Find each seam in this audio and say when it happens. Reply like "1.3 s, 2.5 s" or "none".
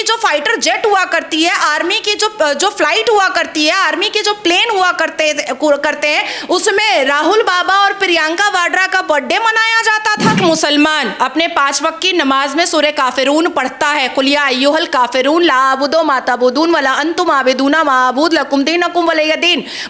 10.4 s